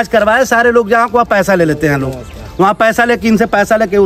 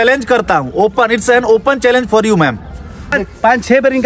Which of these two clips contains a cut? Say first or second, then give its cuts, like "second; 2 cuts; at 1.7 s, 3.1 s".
second; 1 cut; at 3.1 s